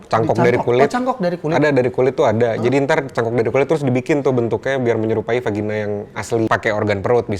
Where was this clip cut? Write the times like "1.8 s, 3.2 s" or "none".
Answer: 6.5 s